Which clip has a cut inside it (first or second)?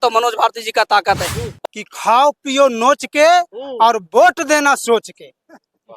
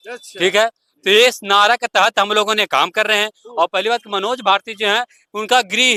first